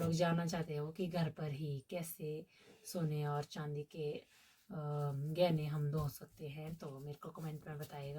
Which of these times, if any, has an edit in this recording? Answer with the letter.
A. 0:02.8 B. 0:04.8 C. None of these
C